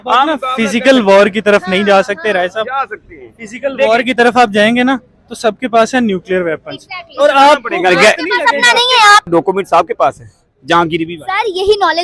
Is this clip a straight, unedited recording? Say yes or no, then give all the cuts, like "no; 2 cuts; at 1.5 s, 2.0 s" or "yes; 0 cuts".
no; 1 cut; at 9.3 s